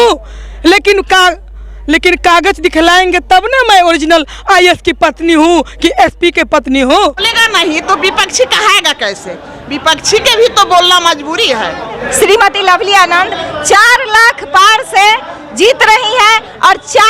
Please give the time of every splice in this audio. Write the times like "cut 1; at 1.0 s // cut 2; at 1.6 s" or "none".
cut 1; at 7.3 s // cut 2; at 12.0 s